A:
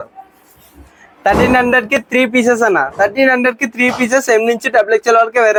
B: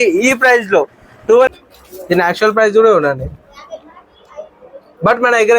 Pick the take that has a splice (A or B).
B